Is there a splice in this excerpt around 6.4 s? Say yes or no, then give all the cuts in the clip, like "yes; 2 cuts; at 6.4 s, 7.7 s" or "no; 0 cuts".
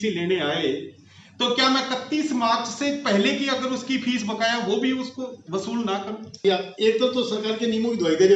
yes; 1 cut; at 6.4 s